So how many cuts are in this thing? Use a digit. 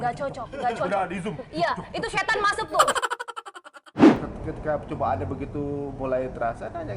1